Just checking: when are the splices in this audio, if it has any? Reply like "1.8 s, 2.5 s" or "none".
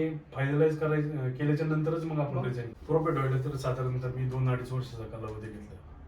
2.6 s